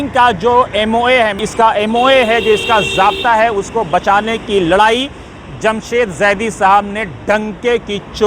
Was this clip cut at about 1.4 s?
yes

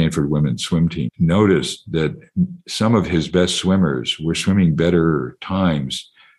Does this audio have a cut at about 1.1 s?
yes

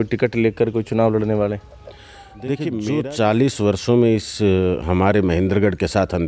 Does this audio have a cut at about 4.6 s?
no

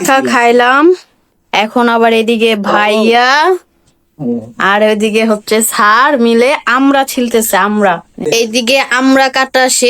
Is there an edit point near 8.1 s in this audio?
yes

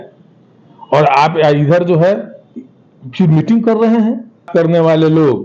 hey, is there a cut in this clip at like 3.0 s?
no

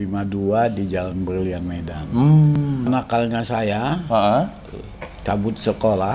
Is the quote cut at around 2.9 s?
yes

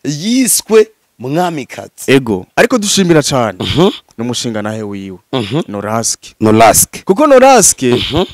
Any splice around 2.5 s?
yes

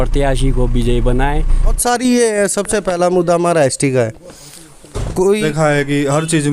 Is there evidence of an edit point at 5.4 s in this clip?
yes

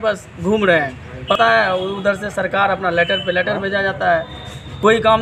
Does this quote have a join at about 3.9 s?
no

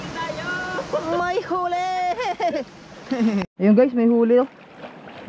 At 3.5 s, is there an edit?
yes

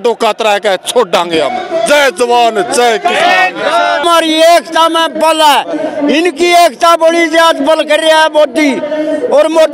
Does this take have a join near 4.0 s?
yes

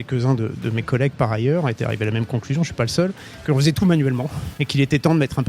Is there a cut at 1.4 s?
no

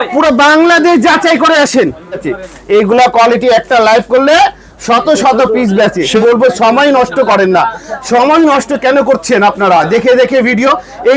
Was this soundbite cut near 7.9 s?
no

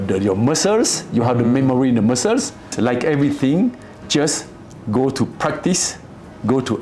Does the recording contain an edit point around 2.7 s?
yes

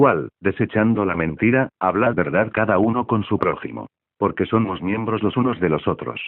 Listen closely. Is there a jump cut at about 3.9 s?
no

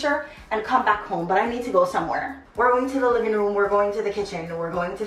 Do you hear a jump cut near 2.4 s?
yes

